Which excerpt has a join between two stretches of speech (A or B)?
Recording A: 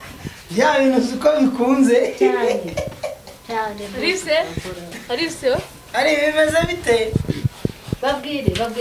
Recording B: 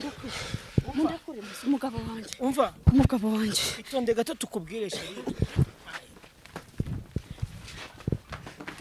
B